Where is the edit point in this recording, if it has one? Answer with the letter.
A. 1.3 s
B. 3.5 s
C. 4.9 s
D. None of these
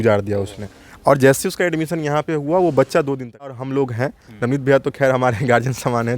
B